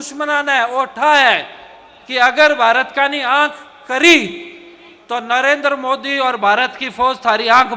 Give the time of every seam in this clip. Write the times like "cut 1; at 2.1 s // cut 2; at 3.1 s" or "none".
none

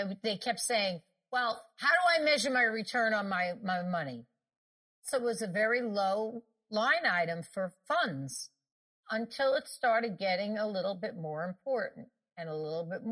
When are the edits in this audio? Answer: cut 1; at 5.1 s // cut 2; at 6.7 s // cut 3; at 7.8 s // cut 4; at 9.0 s

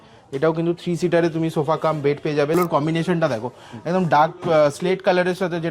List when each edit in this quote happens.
cut 1; at 2.5 s

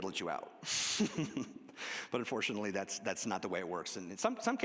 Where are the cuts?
none

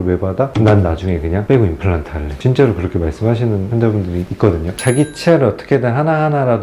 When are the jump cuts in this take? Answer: none

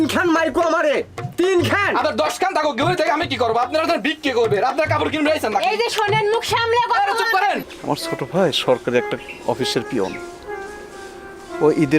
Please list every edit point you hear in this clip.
cut 1; at 7.6 s

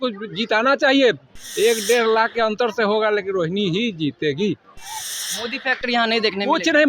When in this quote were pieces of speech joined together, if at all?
cut 1; at 1.3 s

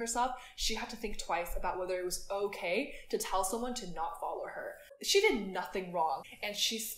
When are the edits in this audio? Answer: cut 1; at 4.8 s // cut 2; at 6.2 s

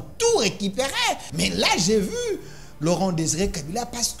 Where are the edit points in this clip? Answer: cut 1; at 1.3 s

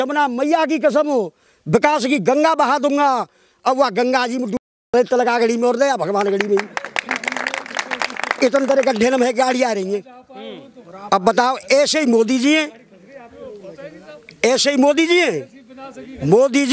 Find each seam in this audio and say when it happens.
none

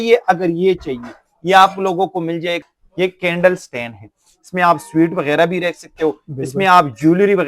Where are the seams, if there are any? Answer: cut 1; at 2.6 s

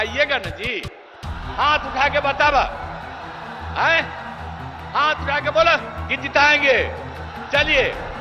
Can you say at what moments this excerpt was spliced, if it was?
none

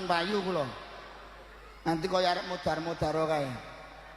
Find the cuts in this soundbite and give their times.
none

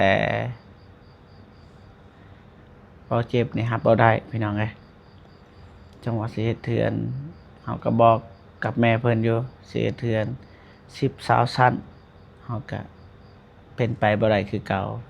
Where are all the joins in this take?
none

